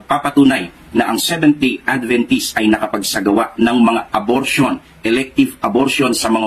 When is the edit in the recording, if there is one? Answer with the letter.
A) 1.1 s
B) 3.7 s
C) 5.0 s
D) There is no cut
C